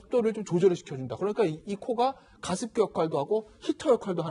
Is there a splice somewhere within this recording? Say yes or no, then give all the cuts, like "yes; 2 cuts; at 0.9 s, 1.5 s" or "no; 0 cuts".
no; 0 cuts